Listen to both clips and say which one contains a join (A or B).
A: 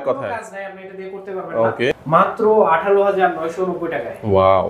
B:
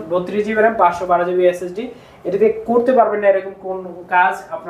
A